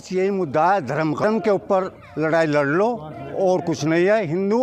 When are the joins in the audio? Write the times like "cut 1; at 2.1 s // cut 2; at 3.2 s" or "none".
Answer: cut 1; at 1.2 s